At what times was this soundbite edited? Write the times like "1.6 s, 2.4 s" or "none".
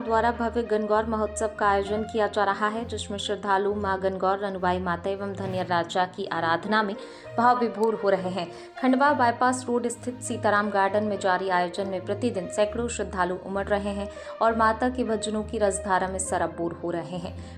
none